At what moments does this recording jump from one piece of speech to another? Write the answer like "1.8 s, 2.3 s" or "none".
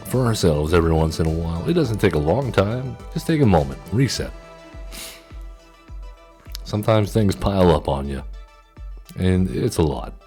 none